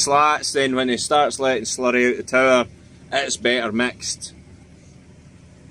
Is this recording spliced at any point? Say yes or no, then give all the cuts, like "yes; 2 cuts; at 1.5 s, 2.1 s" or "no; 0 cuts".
no; 0 cuts